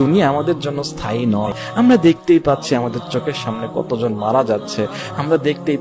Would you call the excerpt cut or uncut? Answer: cut